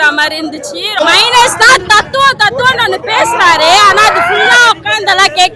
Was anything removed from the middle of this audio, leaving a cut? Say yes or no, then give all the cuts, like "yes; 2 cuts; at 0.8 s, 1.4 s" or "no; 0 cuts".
yes; 1 cut; at 1.0 s